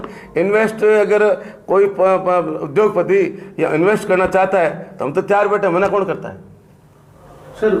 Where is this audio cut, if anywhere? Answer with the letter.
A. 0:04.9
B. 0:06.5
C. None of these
C